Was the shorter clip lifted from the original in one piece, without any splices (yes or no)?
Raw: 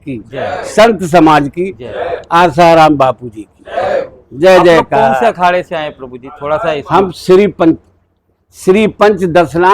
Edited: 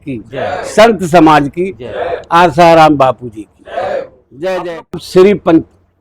no